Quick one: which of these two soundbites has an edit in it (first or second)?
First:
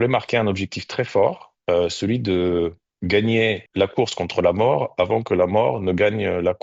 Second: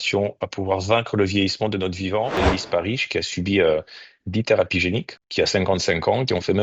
second